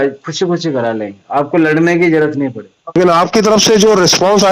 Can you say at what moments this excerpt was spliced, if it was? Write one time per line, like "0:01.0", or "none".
0:03.0